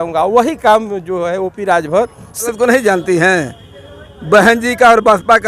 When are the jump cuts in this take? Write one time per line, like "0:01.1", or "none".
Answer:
0:02.5